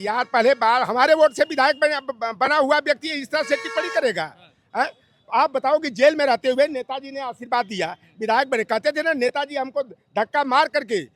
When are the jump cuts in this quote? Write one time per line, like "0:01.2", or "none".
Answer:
none

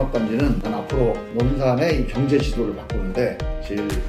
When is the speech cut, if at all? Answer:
0:00.9

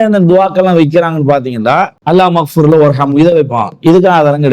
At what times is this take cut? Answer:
0:02.0

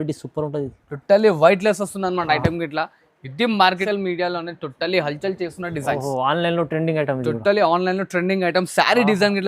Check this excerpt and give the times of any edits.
0:03.8

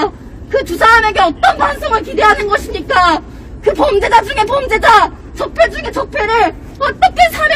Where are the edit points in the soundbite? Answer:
none

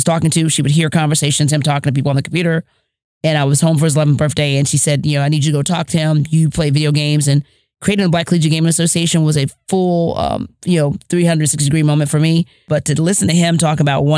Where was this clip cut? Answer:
0:12.6

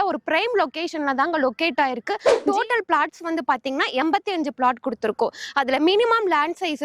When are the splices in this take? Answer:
0:02.3

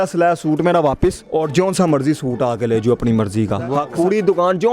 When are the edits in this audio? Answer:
0:01.2
0:03.8

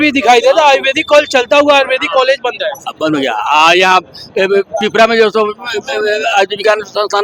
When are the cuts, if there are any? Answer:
none

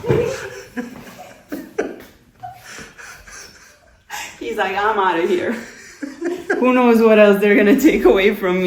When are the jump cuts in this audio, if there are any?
none

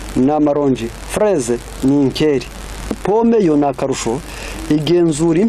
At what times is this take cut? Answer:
0:03.0

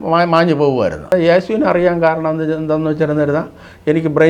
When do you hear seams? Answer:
0:01.1

